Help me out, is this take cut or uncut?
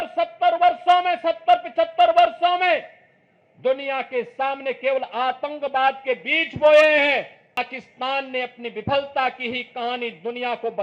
cut